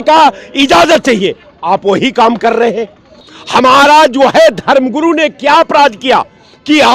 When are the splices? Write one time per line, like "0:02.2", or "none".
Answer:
none